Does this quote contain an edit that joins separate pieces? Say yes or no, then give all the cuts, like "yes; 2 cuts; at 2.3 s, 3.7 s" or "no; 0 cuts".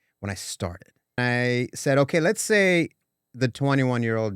yes; 1 cut; at 1.2 s